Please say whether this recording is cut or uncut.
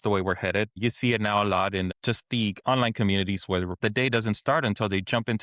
cut